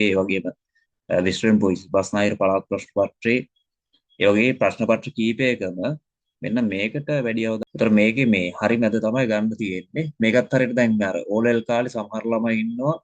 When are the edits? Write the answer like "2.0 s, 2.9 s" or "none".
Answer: 7.6 s